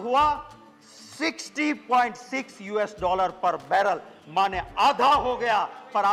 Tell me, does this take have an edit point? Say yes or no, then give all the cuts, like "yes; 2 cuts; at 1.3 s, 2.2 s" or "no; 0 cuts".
no; 0 cuts